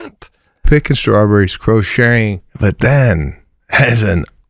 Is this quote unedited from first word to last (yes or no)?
no